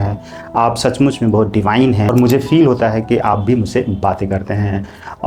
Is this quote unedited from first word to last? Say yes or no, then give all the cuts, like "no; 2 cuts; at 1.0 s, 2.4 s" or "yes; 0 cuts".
no; 1 cut; at 2.1 s